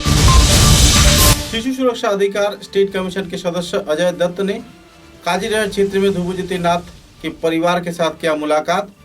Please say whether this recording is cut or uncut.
cut